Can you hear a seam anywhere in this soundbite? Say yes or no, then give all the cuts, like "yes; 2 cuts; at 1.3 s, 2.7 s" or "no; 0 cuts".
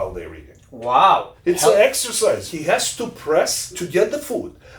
yes; 3 cuts; at 1.3 s, 2.5 s, 3.8 s